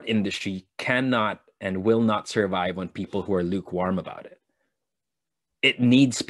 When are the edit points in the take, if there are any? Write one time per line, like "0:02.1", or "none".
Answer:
none